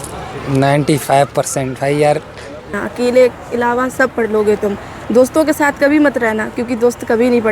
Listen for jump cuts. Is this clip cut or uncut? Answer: cut